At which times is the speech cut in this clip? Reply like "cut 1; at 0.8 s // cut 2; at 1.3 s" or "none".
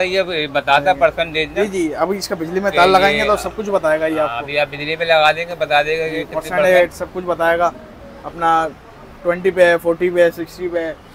none